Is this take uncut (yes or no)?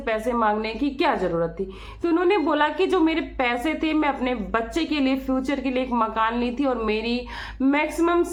yes